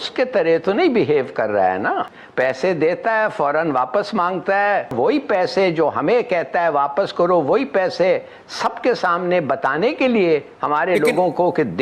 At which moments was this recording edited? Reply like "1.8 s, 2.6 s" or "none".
2.2 s, 4.9 s